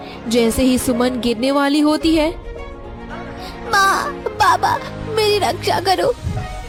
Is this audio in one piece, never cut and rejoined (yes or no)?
yes